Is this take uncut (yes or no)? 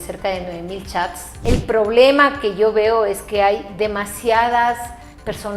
no